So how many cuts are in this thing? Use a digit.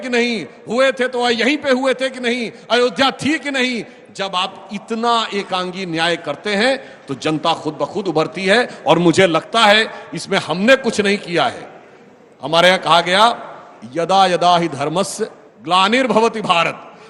0